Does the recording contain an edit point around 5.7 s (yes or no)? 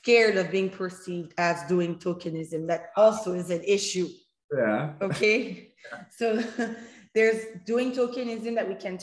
no